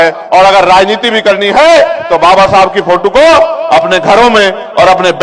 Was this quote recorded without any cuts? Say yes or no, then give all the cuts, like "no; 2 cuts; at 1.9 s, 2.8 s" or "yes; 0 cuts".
yes; 0 cuts